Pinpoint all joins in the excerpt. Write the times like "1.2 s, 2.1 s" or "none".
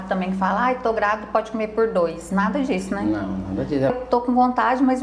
3.9 s